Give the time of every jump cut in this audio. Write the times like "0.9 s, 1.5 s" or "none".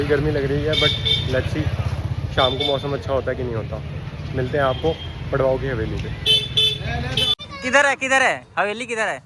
7.4 s